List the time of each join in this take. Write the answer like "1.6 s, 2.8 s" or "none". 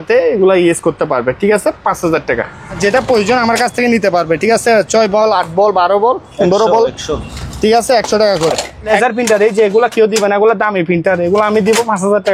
2.8 s, 8.9 s